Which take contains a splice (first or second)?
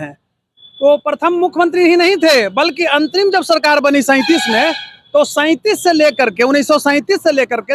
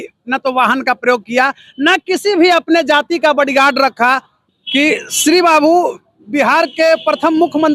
second